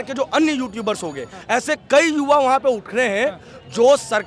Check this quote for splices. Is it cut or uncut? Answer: cut